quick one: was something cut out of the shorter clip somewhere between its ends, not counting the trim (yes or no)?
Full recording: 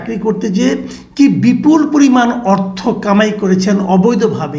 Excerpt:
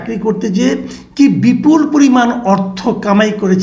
no